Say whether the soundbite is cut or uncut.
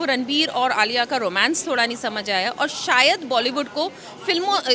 uncut